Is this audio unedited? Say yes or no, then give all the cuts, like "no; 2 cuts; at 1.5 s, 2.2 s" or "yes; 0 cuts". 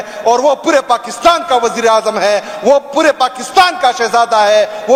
yes; 0 cuts